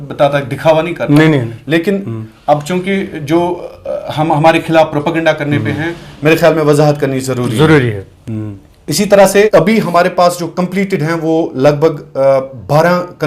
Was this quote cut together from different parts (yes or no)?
yes